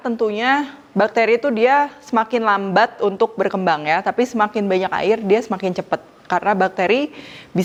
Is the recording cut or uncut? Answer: uncut